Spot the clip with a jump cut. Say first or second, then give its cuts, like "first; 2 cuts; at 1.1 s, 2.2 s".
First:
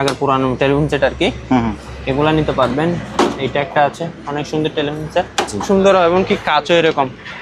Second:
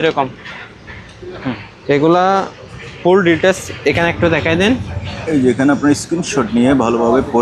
first; 1 cut; at 5.7 s